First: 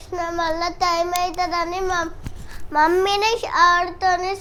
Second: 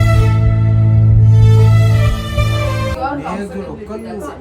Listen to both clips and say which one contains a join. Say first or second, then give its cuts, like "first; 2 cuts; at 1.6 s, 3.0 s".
second; 1 cut; at 3.0 s